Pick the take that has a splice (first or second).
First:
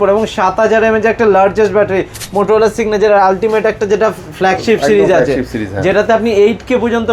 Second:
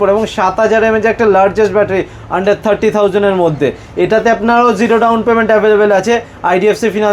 first